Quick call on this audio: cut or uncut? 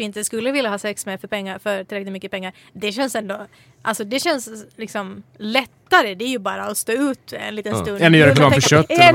uncut